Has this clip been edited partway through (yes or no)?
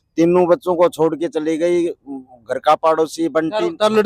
no